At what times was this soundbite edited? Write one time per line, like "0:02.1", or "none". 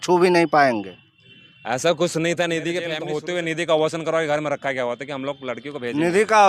0:02.9

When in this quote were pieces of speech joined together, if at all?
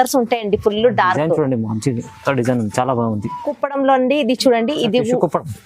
0:03.5

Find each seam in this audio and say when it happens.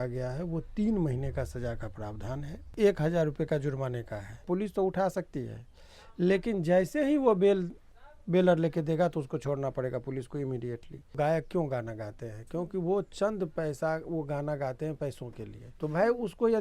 0:02.7
0:04.5
0:11.1
0:15.6

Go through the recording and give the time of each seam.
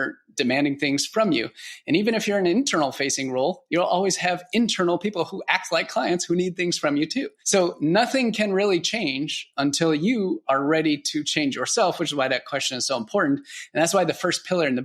0:07.4

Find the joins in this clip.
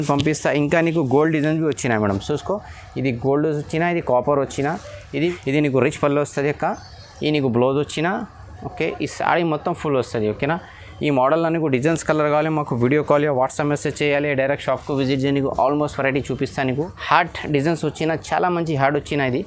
0:05.3
0:17.0

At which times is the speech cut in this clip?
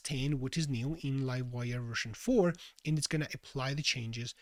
none

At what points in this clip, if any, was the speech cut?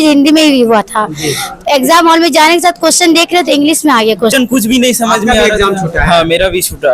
0:04.3

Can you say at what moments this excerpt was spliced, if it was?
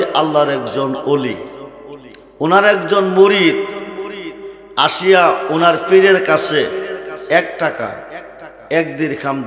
none

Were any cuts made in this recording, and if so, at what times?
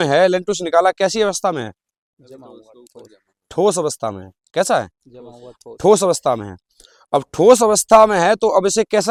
none

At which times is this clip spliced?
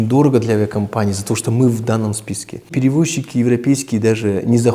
0:02.7

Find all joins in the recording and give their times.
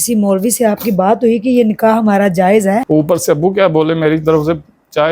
0:02.8

